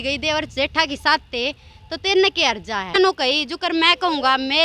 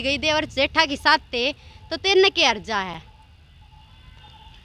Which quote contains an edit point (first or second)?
first